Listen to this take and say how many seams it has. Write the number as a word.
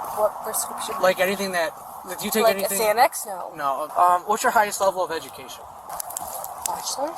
two